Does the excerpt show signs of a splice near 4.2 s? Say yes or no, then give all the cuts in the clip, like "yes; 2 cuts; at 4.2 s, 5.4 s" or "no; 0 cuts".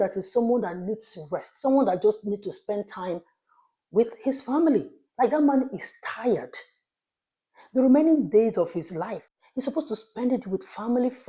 no; 1 cut; at 9.2 s